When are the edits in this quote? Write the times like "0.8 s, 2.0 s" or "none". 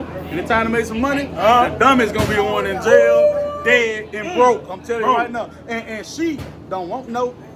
none